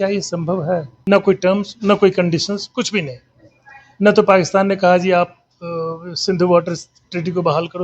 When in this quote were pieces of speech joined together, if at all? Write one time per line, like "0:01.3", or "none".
0:00.9